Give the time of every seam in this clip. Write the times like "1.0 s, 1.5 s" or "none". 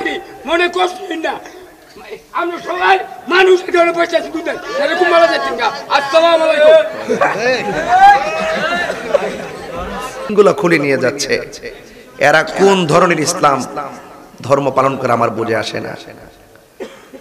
10.3 s